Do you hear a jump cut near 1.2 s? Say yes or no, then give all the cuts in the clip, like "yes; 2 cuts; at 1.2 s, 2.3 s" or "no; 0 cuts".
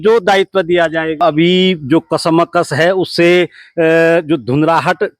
yes; 1 cut; at 1.2 s